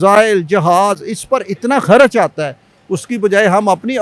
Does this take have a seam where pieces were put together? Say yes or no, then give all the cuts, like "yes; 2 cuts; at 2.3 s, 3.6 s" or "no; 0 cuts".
no; 0 cuts